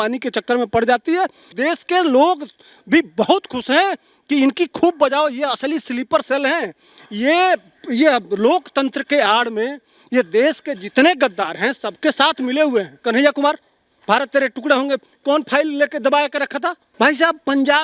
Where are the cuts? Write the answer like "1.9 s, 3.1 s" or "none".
1.5 s, 13.0 s, 16.8 s